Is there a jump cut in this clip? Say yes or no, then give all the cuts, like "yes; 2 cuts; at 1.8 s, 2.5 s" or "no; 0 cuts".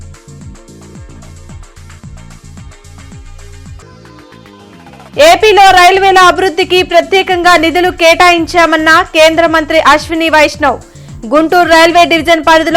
no; 0 cuts